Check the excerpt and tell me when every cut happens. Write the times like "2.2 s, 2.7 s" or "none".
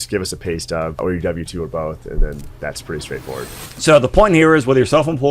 1.0 s, 3.6 s